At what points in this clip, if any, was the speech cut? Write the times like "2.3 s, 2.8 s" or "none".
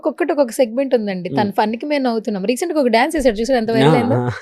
none